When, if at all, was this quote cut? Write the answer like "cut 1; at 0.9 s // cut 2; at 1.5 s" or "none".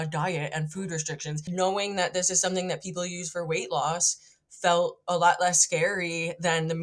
cut 1; at 1.5 s